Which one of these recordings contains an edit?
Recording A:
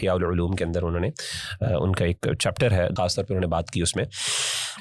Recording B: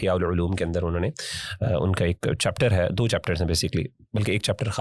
A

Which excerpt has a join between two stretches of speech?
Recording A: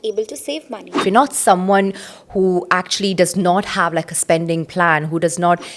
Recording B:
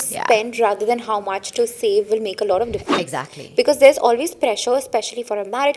A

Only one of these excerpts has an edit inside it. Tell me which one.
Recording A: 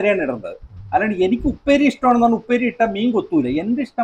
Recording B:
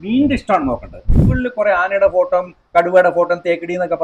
B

